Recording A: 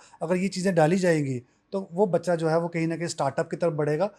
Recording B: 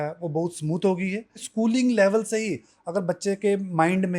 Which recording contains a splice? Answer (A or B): B